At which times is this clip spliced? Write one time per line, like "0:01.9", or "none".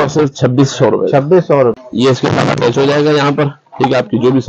0:01.7